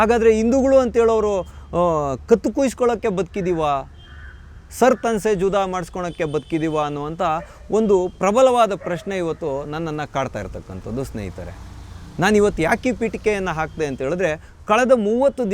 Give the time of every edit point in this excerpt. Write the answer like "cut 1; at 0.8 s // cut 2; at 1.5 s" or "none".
none